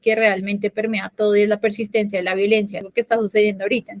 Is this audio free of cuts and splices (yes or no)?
no